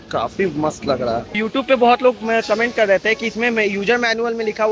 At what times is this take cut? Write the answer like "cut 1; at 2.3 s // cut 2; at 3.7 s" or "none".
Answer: cut 1; at 1.4 s